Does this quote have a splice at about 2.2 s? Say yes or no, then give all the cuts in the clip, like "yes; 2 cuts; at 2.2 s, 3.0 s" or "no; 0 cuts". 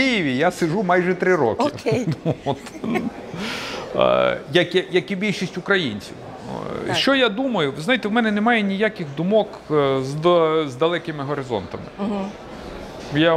no; 0 cuts